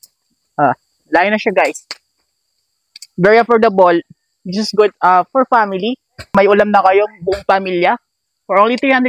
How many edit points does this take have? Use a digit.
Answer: 1